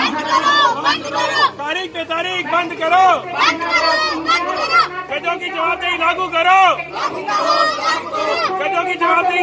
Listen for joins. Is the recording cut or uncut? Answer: uncut